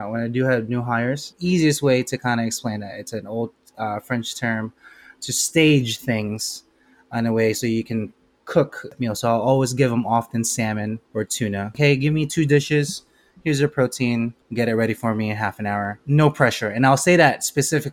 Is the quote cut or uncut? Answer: cut